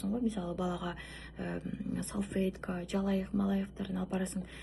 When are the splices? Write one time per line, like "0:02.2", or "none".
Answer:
none